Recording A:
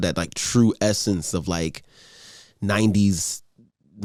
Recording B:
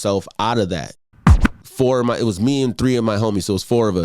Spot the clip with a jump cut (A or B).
B